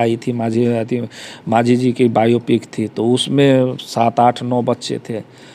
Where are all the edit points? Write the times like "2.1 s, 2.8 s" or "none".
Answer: none